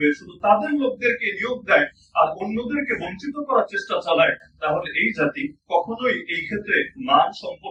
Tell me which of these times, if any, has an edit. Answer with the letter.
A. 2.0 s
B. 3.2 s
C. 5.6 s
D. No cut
D